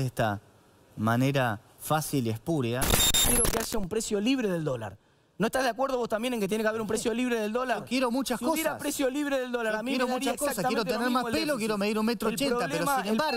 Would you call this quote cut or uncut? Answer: cut